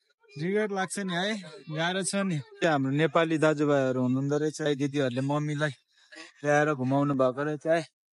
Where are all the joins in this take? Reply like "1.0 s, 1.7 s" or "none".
2.5 s, 4.7 s